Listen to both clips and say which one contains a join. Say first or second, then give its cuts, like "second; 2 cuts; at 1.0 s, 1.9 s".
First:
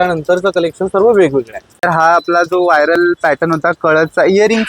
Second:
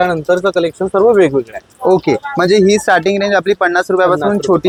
first; 1 cut; at 1.8 s